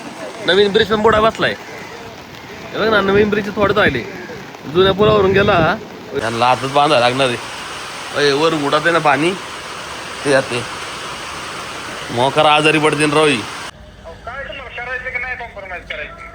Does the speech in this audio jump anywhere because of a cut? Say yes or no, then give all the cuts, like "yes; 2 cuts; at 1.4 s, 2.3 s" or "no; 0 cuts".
yes; 2 cuts; at 6.0 s, 13.6 s